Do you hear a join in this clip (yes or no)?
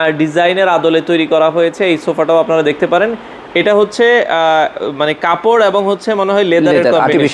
no